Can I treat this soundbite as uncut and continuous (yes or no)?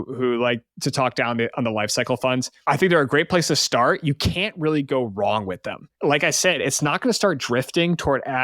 no